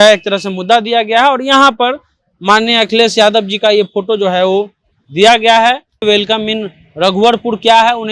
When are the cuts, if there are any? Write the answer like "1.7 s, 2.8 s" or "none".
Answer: 6.0 s